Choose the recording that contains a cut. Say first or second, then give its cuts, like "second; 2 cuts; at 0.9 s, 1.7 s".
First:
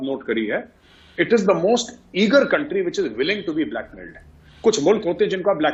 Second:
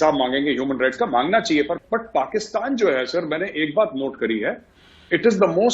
second; 1 cut; at 1.8 s